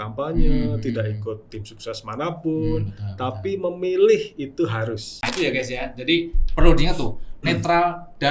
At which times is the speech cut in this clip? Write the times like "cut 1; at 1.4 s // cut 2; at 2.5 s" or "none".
cut 1; at 5.3 s